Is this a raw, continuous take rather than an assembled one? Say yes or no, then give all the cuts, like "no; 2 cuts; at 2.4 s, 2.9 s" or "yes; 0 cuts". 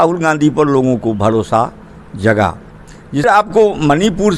no; 1 cut; at 3.2 s